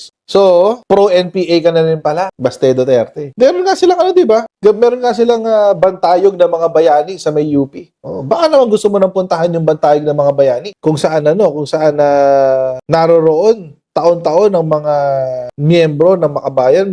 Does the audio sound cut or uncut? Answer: uncut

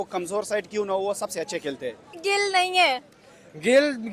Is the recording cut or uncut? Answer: cut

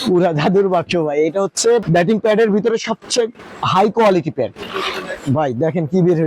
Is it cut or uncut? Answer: cut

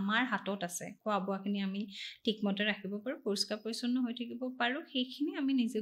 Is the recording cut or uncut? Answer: uncut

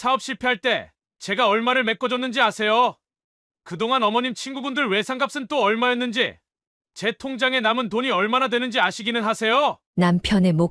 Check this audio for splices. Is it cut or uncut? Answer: uncut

